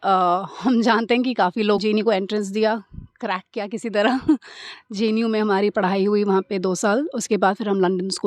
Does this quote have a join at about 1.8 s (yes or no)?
yes